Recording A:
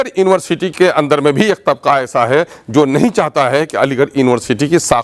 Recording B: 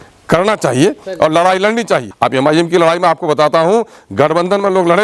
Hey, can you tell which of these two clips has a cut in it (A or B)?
B